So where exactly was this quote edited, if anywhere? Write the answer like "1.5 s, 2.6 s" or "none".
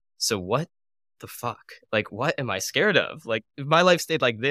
2.1 s, 3.5 s